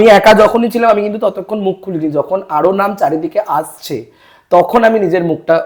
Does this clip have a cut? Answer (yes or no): no